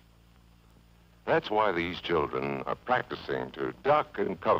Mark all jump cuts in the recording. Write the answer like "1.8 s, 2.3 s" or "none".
3.2 s